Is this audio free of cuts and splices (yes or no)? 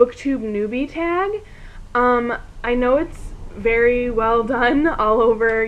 yes